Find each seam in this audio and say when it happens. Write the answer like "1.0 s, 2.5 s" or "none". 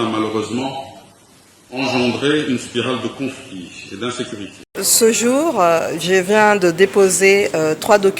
4.6 s